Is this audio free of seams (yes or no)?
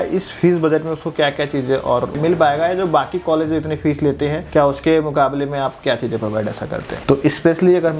no